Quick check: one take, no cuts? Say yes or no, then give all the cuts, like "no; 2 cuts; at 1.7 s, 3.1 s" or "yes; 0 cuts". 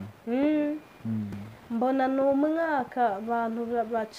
no; 1 cut; at 1.4 s